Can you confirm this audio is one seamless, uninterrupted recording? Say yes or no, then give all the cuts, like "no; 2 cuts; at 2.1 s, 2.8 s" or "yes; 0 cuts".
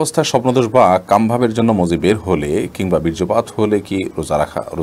yes; 0 cuts